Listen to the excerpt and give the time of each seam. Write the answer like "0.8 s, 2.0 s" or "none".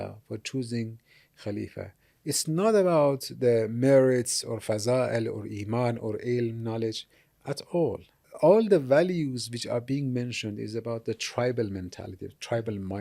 8.3 s